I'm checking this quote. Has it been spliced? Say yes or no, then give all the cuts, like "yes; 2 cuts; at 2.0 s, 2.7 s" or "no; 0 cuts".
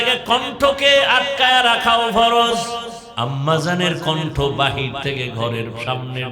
yes; 1 cut; at 3.0 s